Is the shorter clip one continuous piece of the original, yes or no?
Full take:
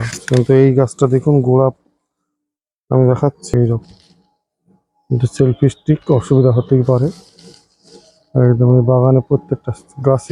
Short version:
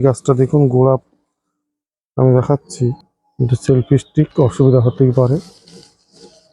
no